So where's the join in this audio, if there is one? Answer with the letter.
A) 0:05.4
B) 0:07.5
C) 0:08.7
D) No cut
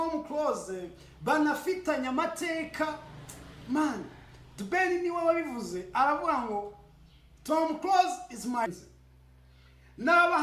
C